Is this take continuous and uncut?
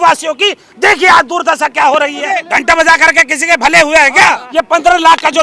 no; 2 cuts; at 2.5 s, 4.5 s

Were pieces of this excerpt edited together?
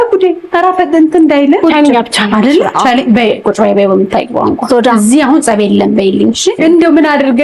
yes; 2 cuts; at 1.6 s, 6.6 s

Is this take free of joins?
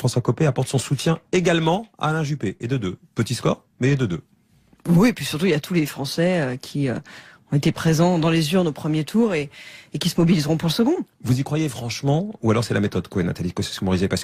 no; 1 cut; at 13.1 s

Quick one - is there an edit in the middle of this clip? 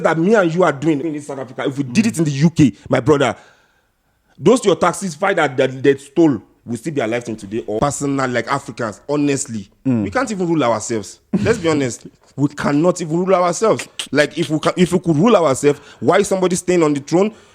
yes; 2 cuts; at 1.0 s, 7.8 s

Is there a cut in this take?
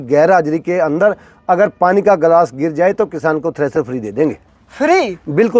no; 0 cuts

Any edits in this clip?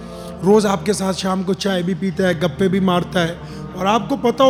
no; 0 cuts

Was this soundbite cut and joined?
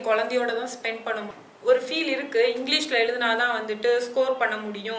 yes; 1 cut; at 1.3 s

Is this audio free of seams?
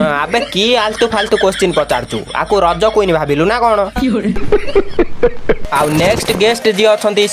no; 1 cut; at 5.6 s

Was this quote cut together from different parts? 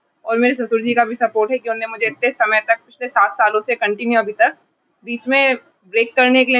no; 0 cuts

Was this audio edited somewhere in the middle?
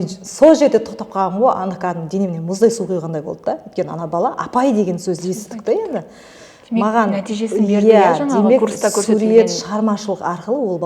no; 0 cuts

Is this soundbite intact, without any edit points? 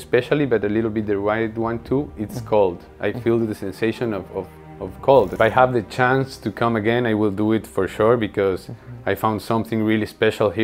no; 1 cut; at 5.3 s

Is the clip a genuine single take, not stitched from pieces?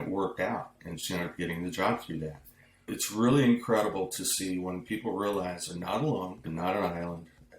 no; 2 cuts; at 2.9 s, 6.4 s

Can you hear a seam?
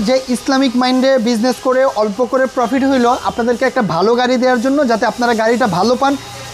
no; 0 cuts

